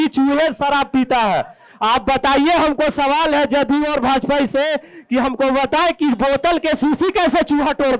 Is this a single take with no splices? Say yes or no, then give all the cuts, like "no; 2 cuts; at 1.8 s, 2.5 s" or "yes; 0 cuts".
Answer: yes; 0 cuts